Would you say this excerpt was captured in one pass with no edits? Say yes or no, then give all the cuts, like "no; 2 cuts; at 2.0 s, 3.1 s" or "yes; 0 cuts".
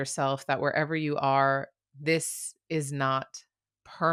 yes; 0 cuts